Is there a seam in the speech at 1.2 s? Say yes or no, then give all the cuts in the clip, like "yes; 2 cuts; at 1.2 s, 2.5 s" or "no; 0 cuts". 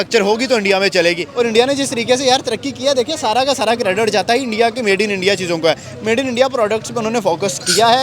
yes; 1 cut; at 1.2 s